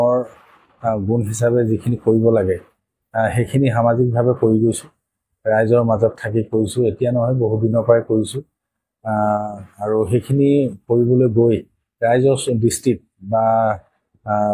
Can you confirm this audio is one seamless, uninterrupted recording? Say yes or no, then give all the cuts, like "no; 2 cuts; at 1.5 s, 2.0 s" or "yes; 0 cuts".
yes; 0 cuts